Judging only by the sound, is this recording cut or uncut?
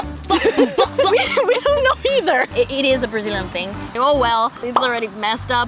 cut